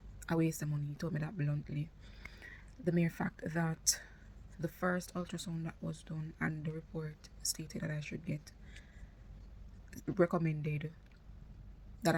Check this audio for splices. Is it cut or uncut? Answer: uncut